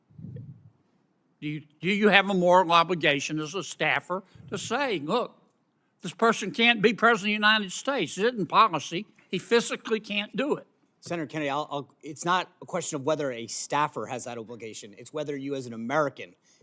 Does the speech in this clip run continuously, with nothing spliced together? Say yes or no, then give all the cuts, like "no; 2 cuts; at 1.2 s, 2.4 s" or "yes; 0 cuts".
yes; 0 cuts